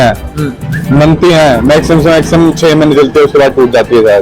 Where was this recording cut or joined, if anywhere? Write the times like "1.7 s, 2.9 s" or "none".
none